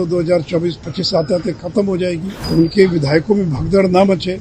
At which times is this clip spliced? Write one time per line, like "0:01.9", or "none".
0:02.3